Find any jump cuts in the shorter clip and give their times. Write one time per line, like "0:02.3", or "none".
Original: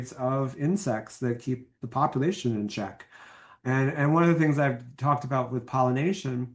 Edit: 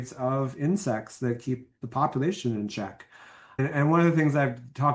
0:03.6